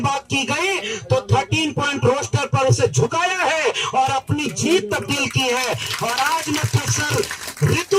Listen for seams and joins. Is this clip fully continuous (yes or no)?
yes